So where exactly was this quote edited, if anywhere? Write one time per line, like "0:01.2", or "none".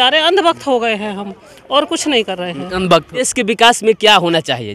0:03.3